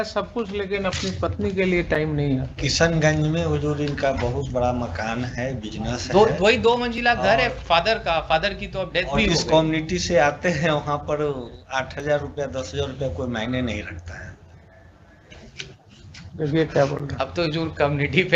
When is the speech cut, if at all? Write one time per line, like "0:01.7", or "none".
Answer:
none